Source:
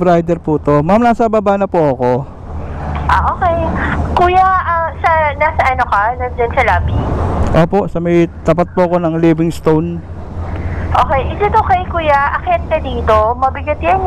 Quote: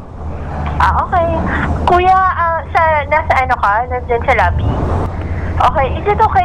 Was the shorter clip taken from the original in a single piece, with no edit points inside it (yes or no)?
no